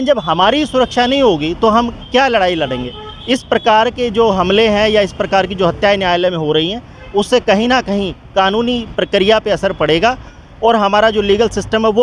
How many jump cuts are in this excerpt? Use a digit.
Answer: 0